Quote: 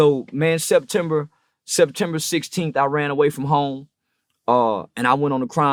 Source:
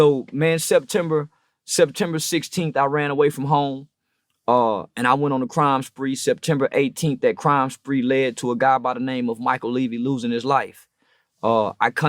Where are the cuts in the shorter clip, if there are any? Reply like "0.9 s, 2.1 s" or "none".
none